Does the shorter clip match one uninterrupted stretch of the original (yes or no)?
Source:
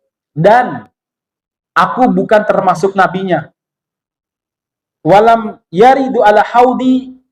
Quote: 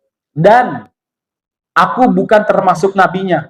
yes